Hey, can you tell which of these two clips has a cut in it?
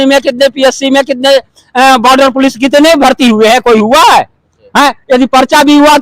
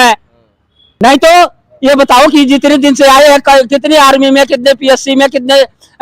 second; 1 cut; at 1.0 s

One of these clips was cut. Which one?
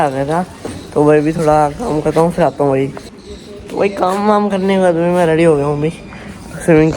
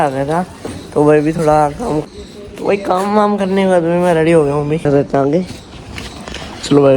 second; 2 cuts; at 2.0 s, 4.8 s

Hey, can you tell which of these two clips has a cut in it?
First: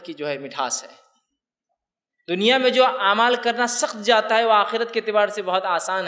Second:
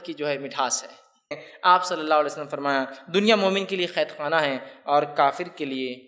second; 1 cut; at 1.5 s

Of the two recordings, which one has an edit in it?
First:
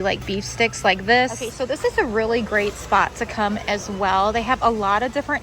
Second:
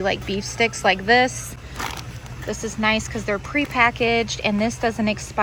first; 1 cut; at 1.4 s

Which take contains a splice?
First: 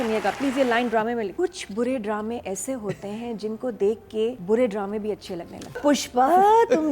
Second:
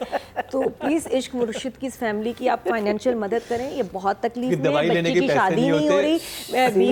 first; 3 cuts; at 1.3 s, 4.4 s, 5.8 s

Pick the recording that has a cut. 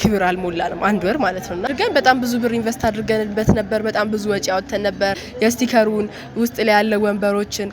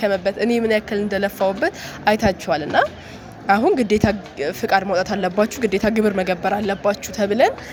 first; 2 cuts; at 1.6 s, 5.2 s

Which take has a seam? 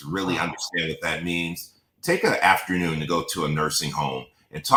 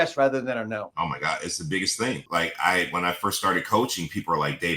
second; 2 cuts; at 0.9 s, 2.2 s

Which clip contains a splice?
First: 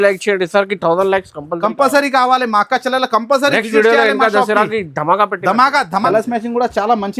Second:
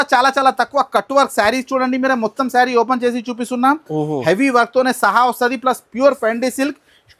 first; 1 cut; at 6.0 s

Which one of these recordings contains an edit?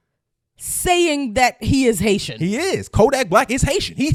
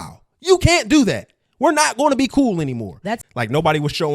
second; 1 cut; at 3.1 s

